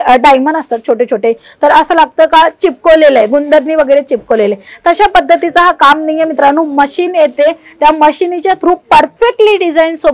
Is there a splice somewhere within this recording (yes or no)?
no